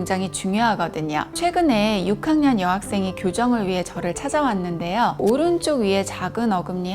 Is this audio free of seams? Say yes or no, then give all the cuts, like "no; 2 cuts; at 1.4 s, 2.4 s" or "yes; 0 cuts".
no; 1 cut; at 1.3 s